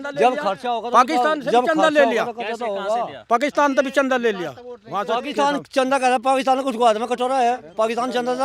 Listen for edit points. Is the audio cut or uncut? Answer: uncut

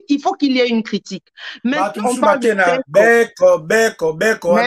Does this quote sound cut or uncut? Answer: cut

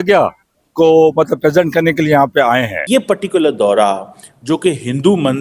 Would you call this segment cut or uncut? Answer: cut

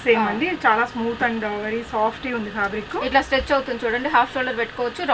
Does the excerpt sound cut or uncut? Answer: uncut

